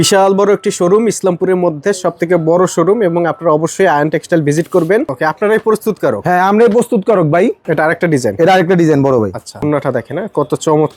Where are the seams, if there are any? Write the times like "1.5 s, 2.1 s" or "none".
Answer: 5.1 s, 7.6 s, 9.6 s